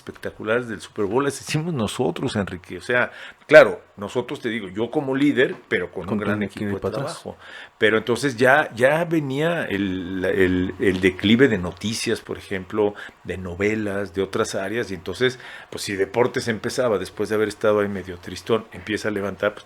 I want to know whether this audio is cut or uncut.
uncut